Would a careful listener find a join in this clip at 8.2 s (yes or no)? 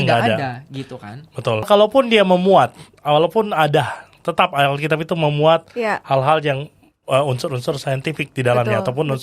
no